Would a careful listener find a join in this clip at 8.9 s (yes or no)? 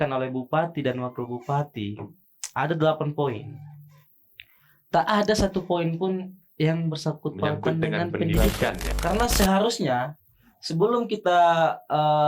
yes